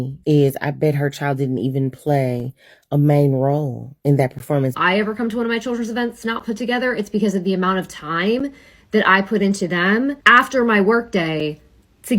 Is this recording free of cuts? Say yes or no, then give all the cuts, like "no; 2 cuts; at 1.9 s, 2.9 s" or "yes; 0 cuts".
no; 2 cuts; at 4.7 s, 10.2 s